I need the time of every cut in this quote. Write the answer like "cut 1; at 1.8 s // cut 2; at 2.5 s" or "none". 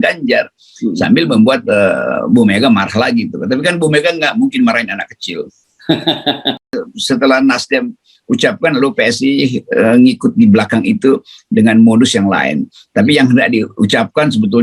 cut 1; at 6.7 s